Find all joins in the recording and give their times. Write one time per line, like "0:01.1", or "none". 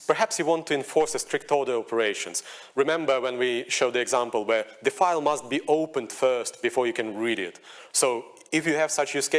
none